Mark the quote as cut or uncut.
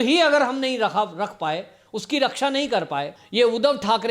cut